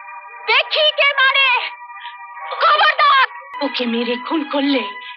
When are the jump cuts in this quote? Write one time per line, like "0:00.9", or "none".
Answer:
0:03.5